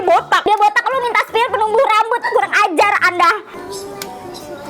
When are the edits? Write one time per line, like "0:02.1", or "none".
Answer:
0:03.5